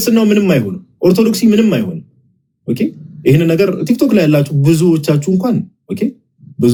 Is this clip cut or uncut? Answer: uncut